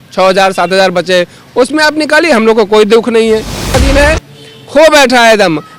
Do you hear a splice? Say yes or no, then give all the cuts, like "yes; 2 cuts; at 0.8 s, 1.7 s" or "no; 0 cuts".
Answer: yes; 1 cut; at 3.8 s